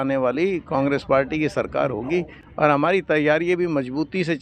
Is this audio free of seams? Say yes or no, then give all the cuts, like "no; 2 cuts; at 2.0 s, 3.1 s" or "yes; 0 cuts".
yes; 0 cuts